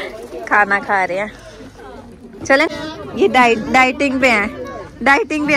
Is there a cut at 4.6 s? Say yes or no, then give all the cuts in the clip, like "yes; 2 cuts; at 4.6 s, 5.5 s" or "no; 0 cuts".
no; 1 cut; at 2.7 s